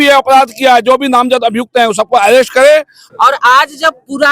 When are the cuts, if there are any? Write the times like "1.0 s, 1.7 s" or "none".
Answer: 3.0 s